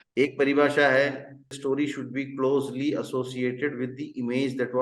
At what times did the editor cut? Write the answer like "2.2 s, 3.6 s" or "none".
1.5 s